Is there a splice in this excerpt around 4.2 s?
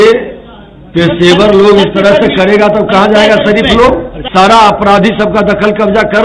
yes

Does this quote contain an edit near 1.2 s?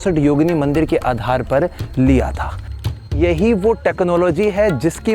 no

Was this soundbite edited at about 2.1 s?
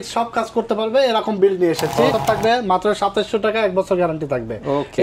yes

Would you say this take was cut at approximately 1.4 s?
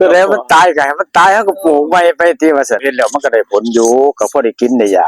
no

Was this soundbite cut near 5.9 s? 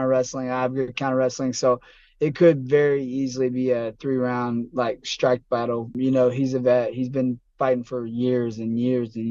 yes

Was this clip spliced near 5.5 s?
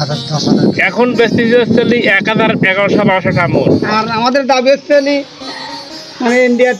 no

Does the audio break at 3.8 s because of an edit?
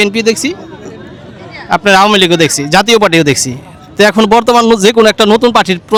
no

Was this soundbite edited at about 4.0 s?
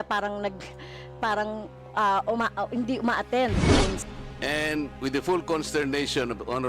yes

